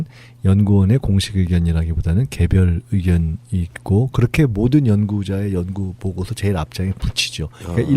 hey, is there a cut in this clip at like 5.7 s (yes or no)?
yes